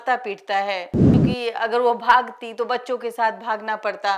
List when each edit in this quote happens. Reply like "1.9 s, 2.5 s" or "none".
1.0 s